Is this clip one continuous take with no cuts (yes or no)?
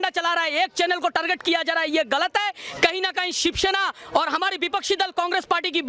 yes